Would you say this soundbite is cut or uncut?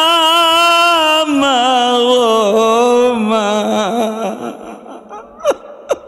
uncut